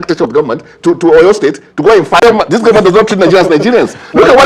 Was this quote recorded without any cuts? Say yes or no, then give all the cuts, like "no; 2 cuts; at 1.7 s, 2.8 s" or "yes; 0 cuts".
no; 1 cut; at 2.2 s